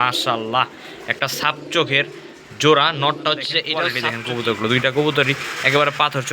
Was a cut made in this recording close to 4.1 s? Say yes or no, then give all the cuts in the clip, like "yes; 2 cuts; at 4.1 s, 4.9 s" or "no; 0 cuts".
yes; 1 cut; at 4.1 s